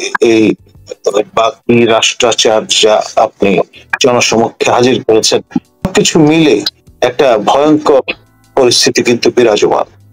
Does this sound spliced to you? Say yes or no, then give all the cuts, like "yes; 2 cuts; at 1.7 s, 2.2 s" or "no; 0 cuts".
yes; 1 cut; at 5.8 s